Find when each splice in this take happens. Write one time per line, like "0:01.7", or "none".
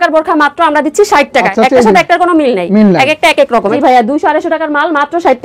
0:01.5
0:03.7